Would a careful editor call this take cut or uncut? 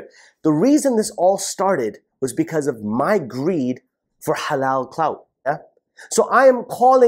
cut